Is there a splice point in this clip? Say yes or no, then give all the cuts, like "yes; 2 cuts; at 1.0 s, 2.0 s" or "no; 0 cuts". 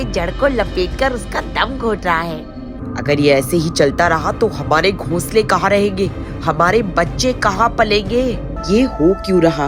yes; 2 cuts; at 2.6 s, 8.5 s